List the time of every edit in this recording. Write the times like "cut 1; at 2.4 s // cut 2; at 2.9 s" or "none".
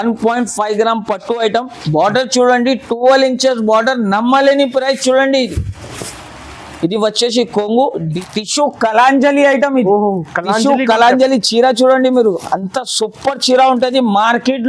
cut 1; at 8.1 s